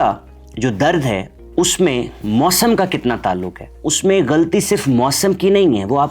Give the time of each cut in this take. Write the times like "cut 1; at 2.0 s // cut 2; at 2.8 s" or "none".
cut 1; at 3.8 s